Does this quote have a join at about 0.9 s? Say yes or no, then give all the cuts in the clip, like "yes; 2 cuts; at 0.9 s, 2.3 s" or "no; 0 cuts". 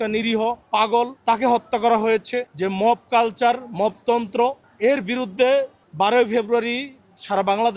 yes; 4 cuts; at 0.9 s, 2.5 s, 4.7 s, 5.8 s